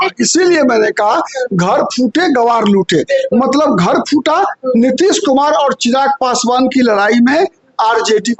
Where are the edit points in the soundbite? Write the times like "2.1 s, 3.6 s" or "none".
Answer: none